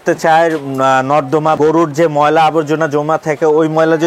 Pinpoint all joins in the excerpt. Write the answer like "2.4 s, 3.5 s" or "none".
none